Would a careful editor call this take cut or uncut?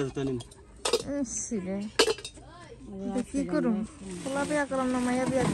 uncut